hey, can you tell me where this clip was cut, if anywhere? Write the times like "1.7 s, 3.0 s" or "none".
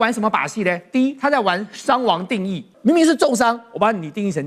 2.7 s